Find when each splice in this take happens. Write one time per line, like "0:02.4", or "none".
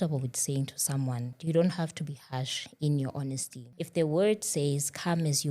0:01.3
0:03.6